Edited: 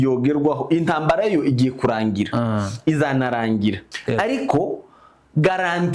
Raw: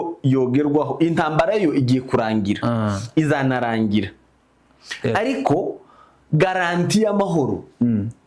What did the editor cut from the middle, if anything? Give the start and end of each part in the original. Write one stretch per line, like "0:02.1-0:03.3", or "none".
0:04.2-0:04.9